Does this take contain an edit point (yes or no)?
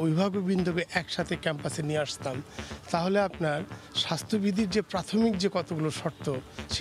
no